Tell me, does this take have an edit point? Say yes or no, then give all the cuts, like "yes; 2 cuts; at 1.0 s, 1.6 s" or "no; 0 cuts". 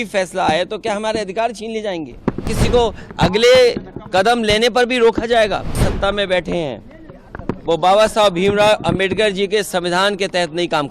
yes; 2 cuts; at 2.6 s, 5.9 s